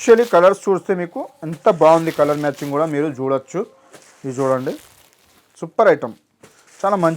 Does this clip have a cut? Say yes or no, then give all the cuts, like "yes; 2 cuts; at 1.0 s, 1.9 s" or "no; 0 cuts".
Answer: no; 0 cuts